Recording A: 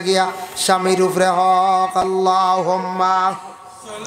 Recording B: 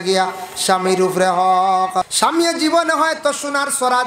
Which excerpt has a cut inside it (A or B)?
B